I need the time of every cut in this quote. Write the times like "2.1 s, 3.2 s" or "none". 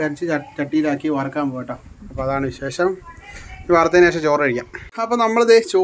4.8 s